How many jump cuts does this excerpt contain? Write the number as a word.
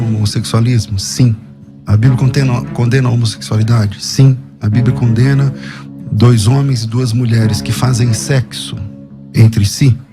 zero